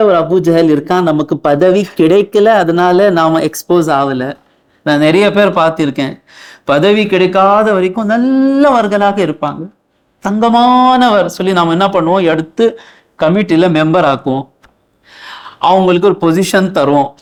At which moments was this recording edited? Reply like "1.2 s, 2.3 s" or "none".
none